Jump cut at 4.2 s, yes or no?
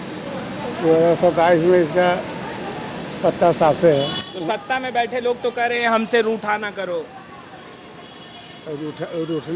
no